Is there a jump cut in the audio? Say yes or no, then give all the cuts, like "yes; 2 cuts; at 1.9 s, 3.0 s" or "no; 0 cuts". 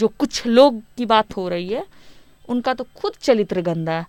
no; 0 cuts